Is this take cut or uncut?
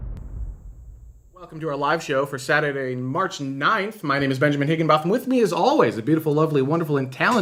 uncut